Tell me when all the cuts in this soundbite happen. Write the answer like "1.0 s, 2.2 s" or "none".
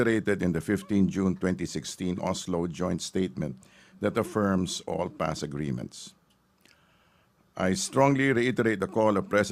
5.9 s